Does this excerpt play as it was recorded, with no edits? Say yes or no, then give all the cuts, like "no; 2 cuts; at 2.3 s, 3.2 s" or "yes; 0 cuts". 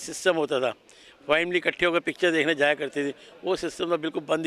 yes; 0 cuts